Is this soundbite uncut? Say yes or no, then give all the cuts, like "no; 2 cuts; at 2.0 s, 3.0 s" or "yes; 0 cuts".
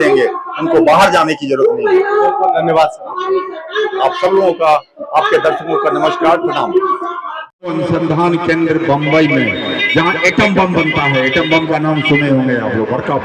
yes; 0 cuts